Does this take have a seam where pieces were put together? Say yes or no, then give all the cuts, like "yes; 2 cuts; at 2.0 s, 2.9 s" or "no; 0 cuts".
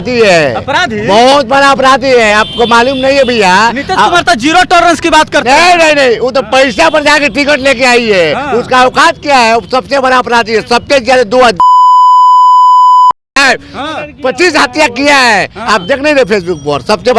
no; 0 cuts